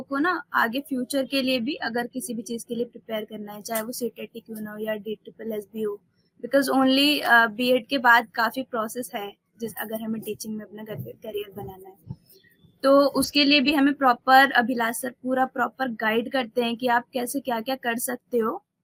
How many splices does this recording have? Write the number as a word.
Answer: zero